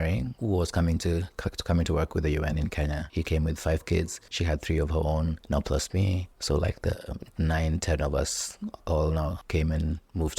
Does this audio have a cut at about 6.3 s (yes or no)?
yes